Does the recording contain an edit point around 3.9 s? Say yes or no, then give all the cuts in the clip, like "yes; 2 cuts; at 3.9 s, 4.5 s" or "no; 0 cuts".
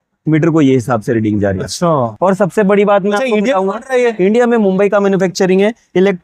no; 1 cut; at 2.1 s